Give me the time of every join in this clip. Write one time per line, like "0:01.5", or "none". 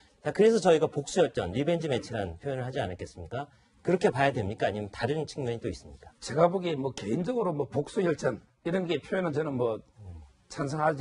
none